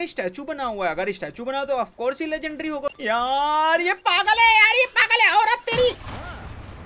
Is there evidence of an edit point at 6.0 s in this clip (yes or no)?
no